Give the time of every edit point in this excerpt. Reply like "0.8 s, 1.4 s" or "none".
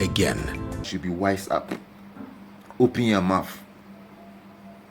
0.9 s

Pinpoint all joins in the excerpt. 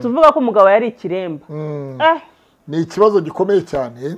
none

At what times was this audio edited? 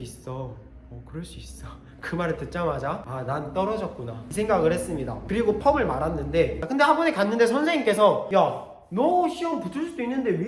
6.6 s

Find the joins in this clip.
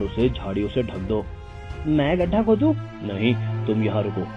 3.0 s

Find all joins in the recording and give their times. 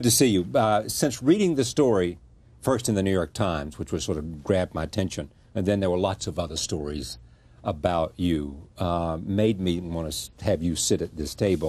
8.5 s

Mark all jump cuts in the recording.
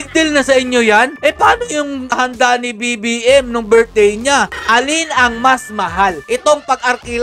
1.1 s, 4.5 s, 6.2 s

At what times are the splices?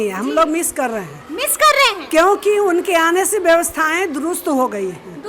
none

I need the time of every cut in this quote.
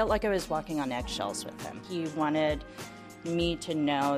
1.7 s

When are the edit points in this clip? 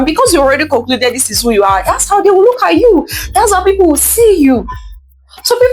none

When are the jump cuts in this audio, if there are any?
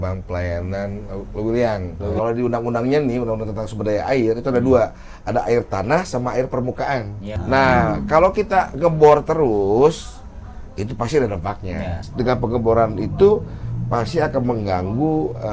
2.1 s, 7.3 s, 12.0 s

